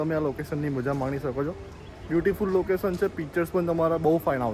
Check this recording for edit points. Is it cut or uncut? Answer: uncut